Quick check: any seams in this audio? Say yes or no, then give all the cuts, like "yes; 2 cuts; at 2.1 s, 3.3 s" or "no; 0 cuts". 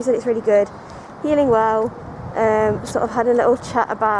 no; 0 cuts